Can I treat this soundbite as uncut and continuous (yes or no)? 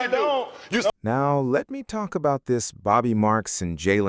no